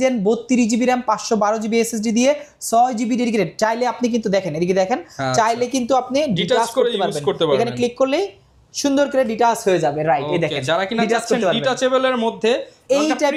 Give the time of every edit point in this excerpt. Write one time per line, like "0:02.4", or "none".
none